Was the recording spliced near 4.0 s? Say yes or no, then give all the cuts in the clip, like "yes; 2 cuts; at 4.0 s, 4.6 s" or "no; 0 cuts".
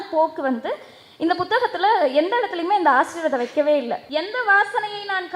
yes; 1 cut; at 4.0 s